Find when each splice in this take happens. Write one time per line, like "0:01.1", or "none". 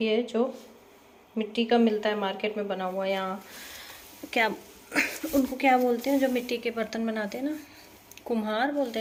none

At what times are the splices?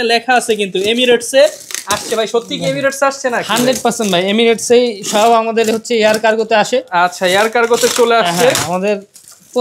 none

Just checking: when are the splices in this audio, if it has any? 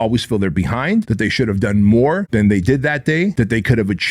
0:01.1
0:02.3
0:03.3

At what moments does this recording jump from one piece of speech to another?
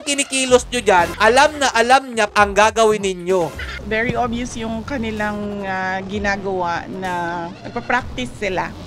0:01.1
0:02.3
0:03.7

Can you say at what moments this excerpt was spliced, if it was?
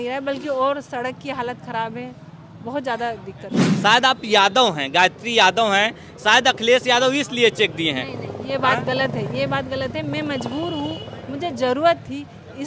0:03.6

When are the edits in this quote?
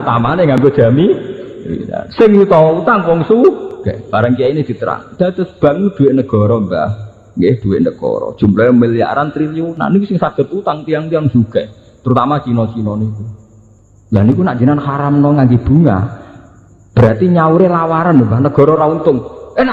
none

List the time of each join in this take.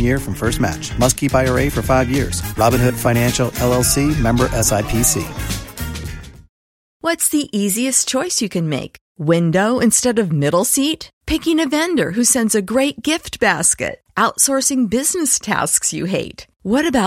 0:07.0

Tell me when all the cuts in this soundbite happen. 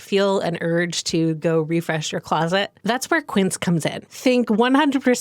0:02.7
0:04.0

